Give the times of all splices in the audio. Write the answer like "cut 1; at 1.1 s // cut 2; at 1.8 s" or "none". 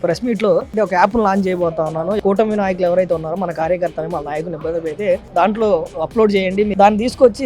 cut 1; at 0.7 s // cut 2; at 2.2 s // cut 3; at 6.7 s

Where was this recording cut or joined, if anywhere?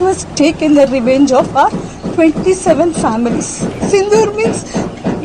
cut 1; at 3.7 s

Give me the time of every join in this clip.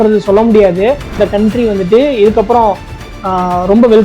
cut 1; at 1.1 s

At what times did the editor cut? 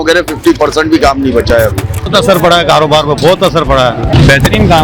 cut 1; at 2.1 s // cut 2; at 4.0 s

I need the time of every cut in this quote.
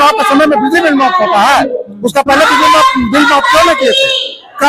none

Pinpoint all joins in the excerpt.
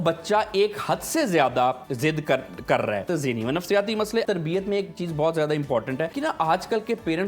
cut 1; at 3.1 s // cut 2; at 4.2 s // cut 3; at 6.1 s

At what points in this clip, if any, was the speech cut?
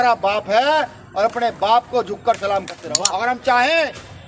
cut 1; at 2.8 s

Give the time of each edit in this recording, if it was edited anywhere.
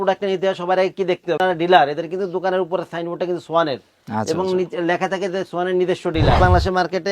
cut 1; at 1.4 s // cut 2; at 6.4 s

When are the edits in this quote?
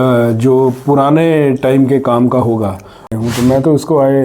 cut 1; at 3.1 s

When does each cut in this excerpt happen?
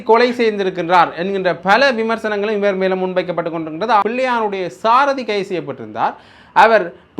cut 1; at 4.0 s

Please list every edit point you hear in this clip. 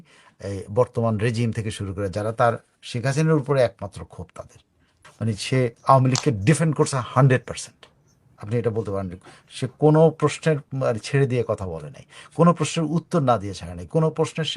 cut 1; at 4.9 s

